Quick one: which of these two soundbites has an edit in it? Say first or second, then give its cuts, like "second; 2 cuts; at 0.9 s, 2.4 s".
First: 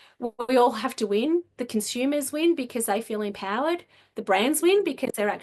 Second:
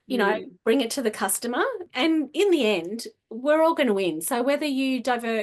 second; 1 cut; at 1.8 s